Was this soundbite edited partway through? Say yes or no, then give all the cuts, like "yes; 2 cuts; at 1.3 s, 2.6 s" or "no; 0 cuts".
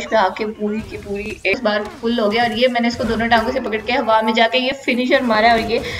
yes; 1 cut; at 1.5 s